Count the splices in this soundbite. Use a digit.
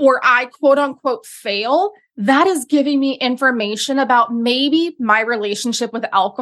0